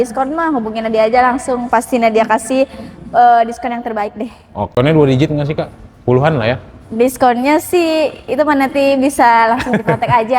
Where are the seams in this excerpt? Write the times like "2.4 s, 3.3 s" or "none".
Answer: 4.7 s